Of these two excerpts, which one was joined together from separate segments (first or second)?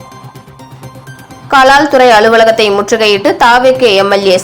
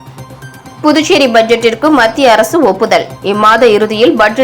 first